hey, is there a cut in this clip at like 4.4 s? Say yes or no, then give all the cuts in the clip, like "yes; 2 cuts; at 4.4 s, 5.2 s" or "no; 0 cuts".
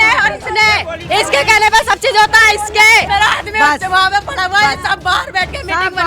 no; 1 cut; at 3.1 s